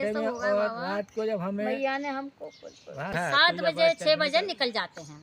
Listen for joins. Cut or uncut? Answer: cut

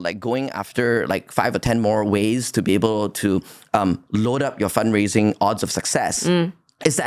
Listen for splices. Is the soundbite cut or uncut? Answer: uncut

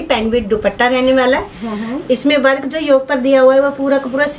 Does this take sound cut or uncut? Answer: uncut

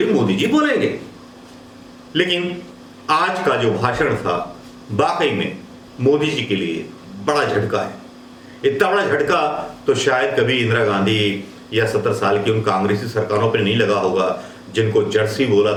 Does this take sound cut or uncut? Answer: uncut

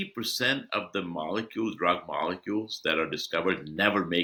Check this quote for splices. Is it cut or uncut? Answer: uncut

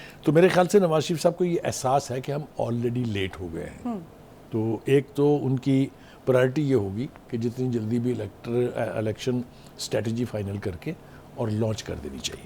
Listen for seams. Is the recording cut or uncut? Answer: uncut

